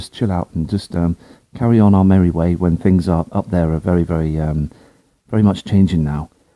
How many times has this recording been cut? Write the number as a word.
zero